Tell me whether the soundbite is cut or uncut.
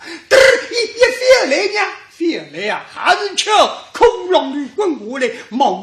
uncut